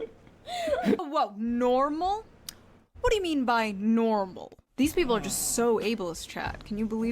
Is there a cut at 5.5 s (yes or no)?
no